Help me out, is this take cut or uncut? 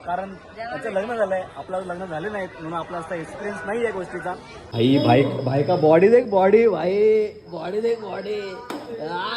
cut